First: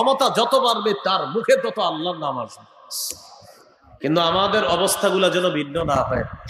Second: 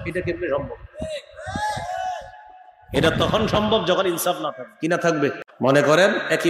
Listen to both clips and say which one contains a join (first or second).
second